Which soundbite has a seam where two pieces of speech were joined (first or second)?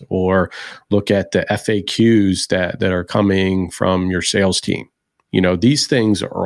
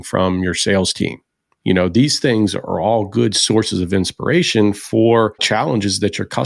second